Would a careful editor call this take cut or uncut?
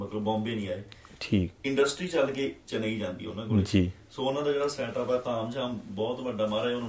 uncut